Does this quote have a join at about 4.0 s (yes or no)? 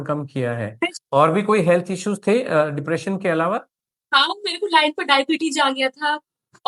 no